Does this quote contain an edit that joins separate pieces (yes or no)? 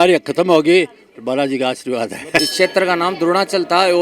yes